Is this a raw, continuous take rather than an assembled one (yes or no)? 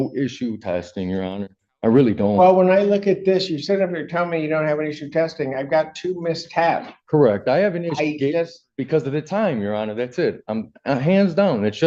yes